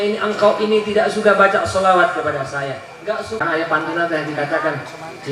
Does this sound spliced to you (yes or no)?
yes